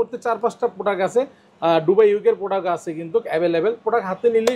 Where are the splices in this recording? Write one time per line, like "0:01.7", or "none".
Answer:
none